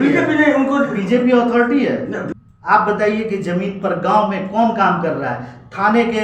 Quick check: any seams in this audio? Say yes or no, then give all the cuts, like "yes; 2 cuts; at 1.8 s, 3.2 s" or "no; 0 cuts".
yes; 1 cut; at 2.3 s